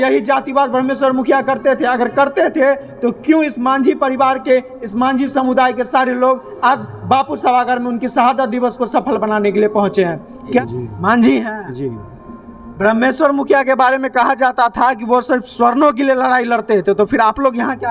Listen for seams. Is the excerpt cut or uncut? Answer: cut